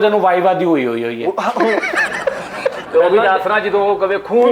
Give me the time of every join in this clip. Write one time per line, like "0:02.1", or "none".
0:02.8

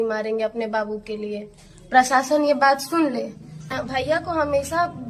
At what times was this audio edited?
0:03.8

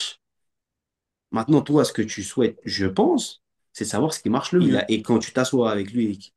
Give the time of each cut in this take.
0:04.8

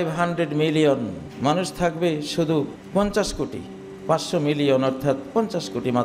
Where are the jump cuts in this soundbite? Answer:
0:01.2
0:02.8

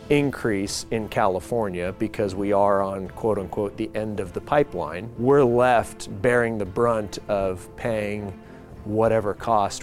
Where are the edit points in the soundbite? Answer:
0:05.0

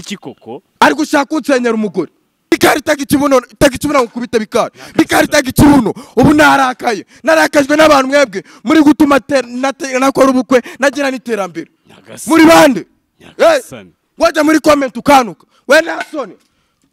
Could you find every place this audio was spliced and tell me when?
0:02.5

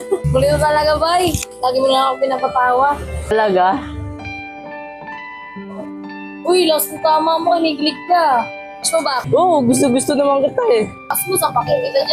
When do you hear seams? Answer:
0:11.2

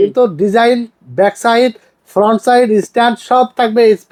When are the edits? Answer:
none

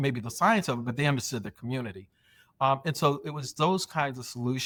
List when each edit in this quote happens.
none

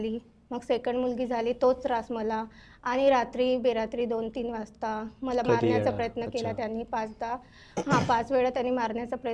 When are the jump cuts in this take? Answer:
none

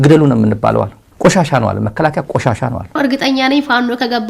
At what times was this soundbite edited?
0:02.9

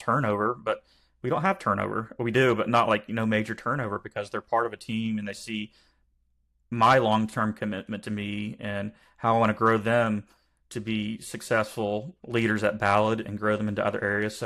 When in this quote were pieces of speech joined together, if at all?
0:12.2

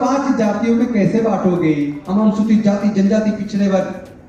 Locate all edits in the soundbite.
0:02.0

